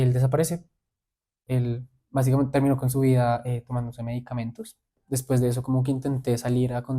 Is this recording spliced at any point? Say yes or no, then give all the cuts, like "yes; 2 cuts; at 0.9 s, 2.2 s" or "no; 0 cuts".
yes; 2 cuts; at 1.4 s, 4.7 s